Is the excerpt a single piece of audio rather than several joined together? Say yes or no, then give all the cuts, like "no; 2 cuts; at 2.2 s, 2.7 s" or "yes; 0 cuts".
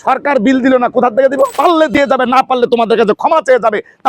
no; 1 cut; at 1.6 s